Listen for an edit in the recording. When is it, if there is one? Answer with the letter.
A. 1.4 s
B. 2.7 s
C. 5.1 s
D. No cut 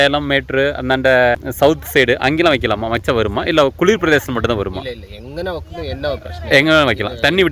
A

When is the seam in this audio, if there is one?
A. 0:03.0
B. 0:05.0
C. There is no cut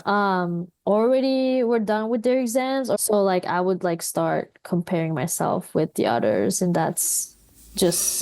A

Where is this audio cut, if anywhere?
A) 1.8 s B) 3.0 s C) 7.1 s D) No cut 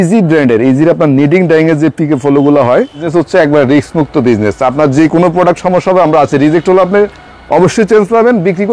B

